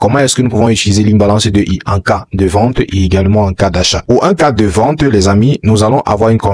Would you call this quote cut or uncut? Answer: uncut